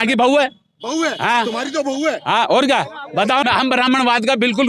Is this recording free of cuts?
no; 1 cut; at 3.4 s

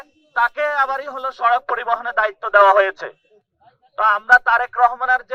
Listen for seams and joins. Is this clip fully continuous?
yes; 0 cuts

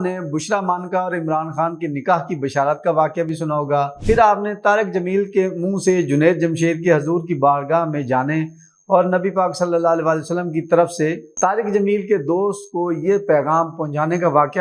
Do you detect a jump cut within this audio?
no; 0 cuts

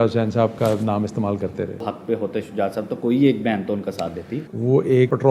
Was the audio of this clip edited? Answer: yes; 2 cuts; at 1.8 s, 4.4 s

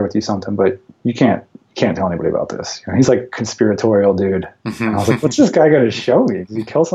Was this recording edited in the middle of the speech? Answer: no; 0 cuts

